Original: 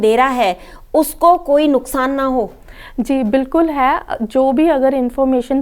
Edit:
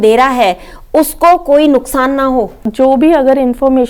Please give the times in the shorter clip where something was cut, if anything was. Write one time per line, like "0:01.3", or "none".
0:02.6